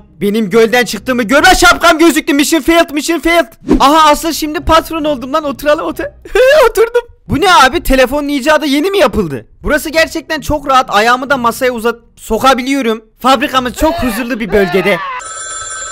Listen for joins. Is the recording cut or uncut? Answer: cut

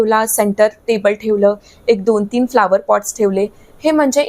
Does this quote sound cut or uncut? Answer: uncut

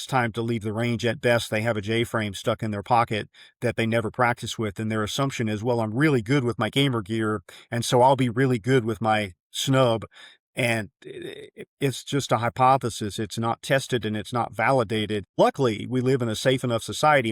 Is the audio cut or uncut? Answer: cut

